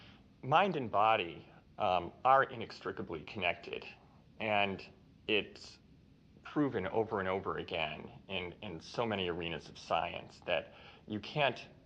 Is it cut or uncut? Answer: cut